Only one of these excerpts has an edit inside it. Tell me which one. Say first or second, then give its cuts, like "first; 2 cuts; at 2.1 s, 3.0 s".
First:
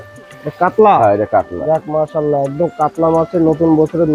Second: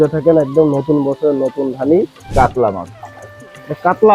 second; 1 cut; at 2.2 s